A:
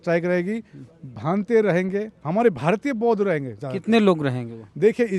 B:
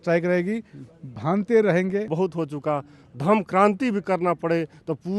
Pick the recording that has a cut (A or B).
B